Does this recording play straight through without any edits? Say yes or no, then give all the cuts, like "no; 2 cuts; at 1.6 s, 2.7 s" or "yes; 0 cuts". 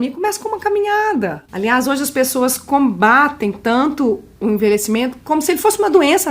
no; 2 cuts; at 1.4 s, 5.2 s